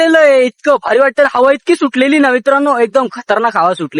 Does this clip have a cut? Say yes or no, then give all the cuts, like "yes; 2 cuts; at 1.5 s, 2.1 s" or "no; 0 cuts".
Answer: no; 0 cuts